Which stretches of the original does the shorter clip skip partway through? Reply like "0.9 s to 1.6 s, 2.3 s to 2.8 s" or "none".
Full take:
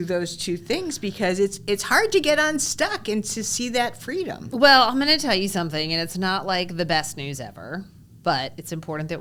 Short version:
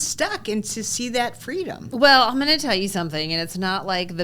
none